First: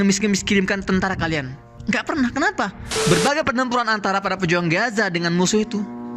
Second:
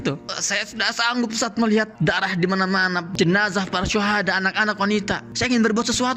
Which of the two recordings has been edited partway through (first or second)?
first